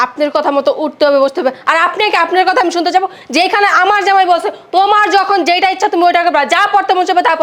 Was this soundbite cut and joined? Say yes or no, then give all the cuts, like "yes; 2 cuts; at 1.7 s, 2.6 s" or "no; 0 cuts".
no; 0 cuts